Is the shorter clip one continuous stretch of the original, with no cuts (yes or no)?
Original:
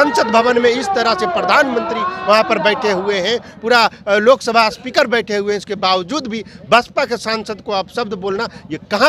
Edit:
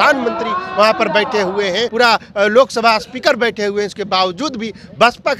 no